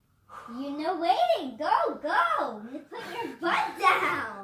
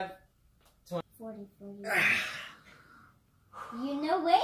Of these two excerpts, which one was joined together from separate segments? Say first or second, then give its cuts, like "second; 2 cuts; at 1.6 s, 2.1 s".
second; 1 cut; at 1.0 s